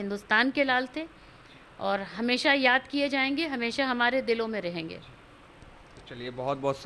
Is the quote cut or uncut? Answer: uncut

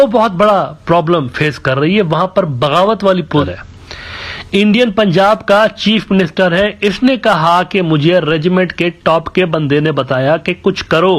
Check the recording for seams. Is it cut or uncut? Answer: cut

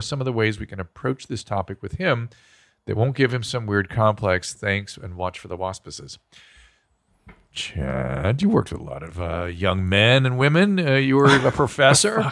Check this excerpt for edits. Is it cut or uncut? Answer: uncut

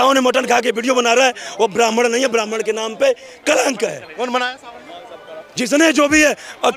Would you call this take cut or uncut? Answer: uncut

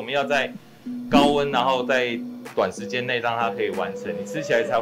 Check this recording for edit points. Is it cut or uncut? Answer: uncut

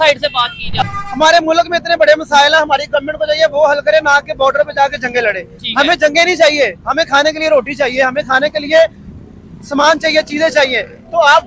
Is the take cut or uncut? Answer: cut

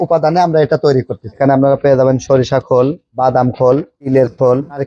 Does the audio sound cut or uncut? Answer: cut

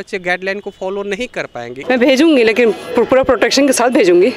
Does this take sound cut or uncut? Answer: uncut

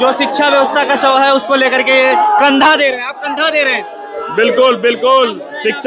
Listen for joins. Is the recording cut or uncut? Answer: uncut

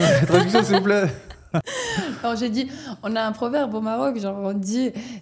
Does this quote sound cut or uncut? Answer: cut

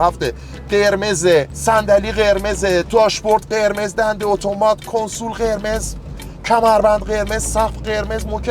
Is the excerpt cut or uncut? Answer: cut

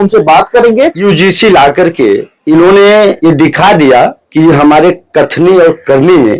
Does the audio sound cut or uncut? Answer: cut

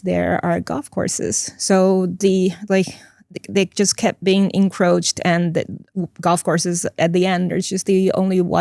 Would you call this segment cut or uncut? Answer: uncut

